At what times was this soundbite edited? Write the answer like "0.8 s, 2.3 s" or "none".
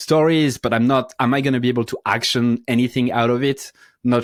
none